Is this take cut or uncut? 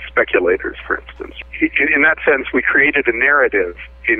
cut